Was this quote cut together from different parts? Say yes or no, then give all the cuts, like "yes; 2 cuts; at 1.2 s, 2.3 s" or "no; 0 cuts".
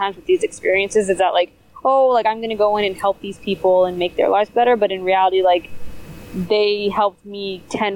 no; 0 cuts